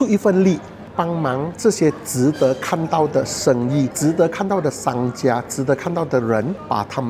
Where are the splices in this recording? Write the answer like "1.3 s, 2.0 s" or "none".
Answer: none

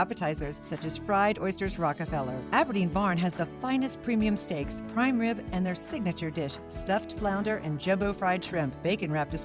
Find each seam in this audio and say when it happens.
none

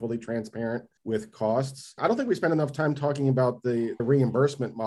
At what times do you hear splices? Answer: 0.9 s, 1.9 s, 4.0 s

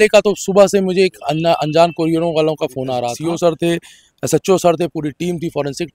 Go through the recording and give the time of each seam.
3.1 s

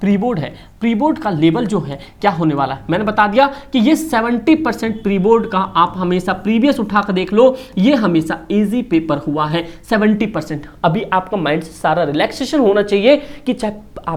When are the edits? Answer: none

